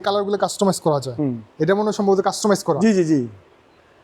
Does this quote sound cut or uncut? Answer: uncut